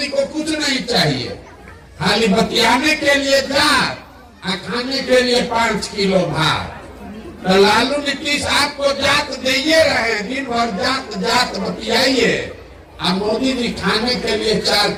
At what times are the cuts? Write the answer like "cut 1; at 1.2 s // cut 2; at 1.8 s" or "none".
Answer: none

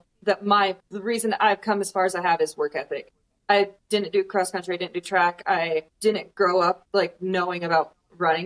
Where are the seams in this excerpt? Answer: cut 1; at 0.9 s // cut 2; at 5.9 s // cut 3; at 6.8 s

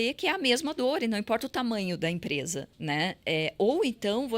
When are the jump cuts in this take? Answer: cut 1; at 2.7 s

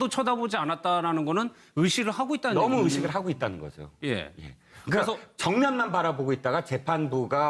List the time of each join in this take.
none

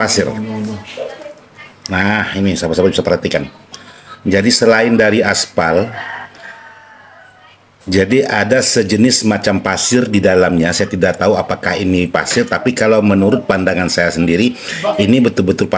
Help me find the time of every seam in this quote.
none

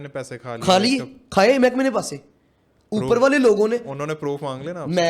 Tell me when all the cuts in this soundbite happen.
none

